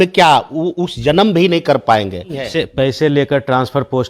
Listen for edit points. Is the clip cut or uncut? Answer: cut